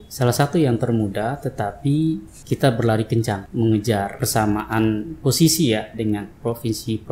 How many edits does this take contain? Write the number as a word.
three